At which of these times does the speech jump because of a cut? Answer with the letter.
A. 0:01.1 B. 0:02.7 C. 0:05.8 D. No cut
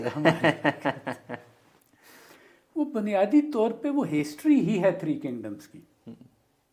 D